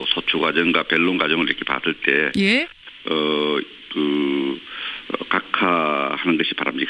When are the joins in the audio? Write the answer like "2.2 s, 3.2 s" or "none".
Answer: 4.6 s